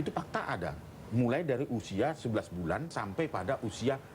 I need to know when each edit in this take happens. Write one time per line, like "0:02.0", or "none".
0:03.0